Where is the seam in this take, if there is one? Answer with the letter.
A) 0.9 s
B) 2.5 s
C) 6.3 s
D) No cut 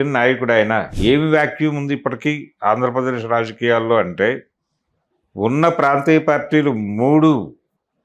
A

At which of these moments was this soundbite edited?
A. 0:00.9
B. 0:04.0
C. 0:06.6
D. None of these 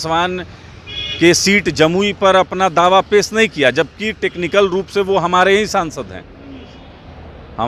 D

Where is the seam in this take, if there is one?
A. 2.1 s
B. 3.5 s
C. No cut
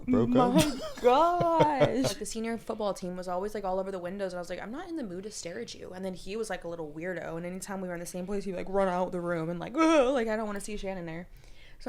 A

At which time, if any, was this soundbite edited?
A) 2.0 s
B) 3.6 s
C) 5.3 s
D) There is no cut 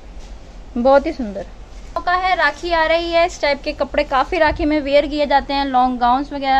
A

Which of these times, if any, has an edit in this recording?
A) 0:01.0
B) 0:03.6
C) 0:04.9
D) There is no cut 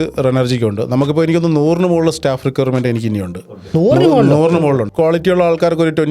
C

